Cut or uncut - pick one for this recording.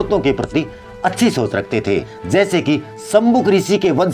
cut